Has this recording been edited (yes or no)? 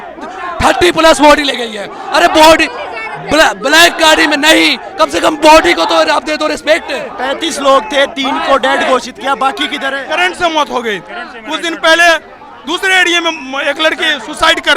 yes